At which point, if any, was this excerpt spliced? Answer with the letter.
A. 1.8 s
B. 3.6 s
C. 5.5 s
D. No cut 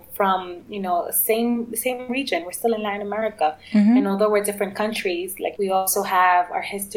C